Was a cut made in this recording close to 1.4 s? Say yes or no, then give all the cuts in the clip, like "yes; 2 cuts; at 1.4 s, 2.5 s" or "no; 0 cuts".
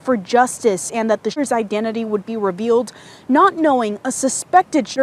yes; 1 cut; at 1.4 s